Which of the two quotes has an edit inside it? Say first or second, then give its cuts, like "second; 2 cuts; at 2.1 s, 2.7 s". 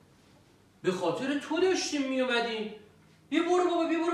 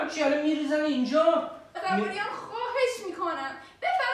second; 1 cut; at 1.6 s